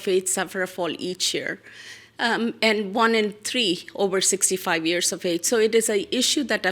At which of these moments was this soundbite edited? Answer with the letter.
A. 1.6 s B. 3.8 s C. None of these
C